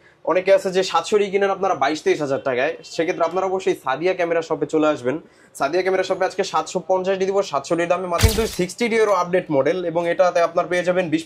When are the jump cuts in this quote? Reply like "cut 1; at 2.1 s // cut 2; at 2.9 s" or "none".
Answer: cut 1; at 8.2 s